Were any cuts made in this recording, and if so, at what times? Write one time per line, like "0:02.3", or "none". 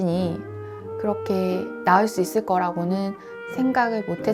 none